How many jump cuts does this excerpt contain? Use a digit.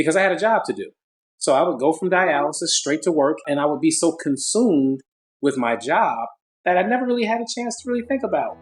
1